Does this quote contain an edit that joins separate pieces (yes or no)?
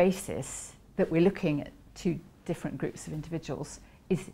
no